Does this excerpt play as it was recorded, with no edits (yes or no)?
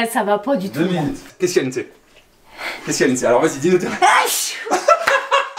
no